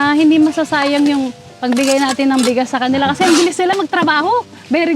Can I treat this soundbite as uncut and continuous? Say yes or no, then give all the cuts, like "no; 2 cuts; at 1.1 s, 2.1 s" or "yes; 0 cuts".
yes; 0 cuts